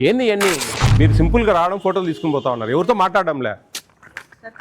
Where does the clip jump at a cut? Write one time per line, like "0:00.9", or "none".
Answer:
0:00.9